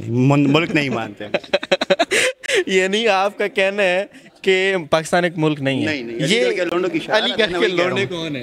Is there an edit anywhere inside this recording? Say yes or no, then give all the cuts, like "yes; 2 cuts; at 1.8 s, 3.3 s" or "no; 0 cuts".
no; 0 cuts